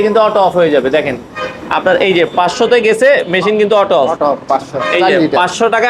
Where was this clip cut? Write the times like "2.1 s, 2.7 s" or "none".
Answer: none